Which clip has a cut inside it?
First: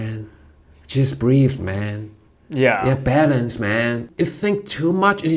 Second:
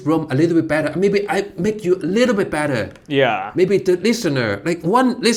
first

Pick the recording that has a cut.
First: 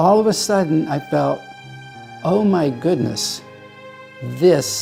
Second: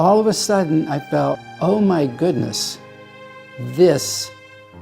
second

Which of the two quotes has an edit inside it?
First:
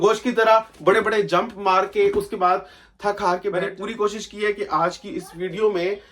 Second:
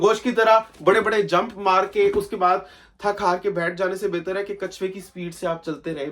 first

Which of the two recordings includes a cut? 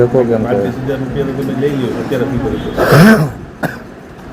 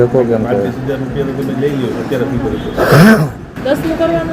second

